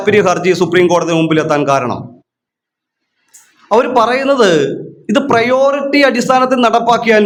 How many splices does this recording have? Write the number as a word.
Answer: zero